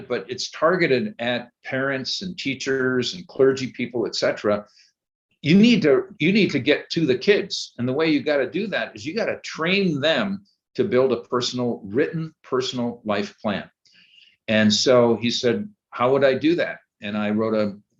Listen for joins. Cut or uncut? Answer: uncut